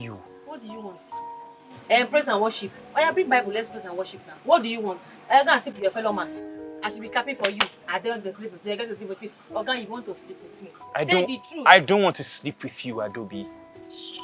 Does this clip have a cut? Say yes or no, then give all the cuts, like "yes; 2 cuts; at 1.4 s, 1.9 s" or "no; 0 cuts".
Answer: no; 0 cuts